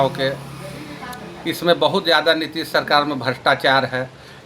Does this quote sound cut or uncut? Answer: uncut